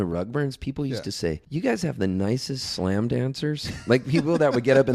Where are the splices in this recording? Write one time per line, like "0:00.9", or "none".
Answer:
0:01.4